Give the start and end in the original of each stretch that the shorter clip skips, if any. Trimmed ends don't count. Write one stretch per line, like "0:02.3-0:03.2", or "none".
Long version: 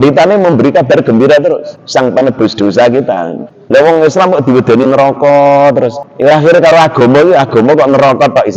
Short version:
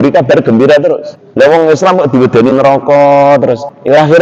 0:01.7-0:03.5